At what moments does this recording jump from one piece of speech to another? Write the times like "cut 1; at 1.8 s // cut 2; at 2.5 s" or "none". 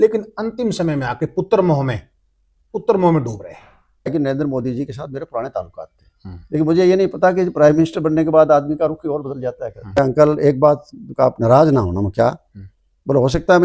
cut 1; at 4.1 s // cut 2; at 10.0 s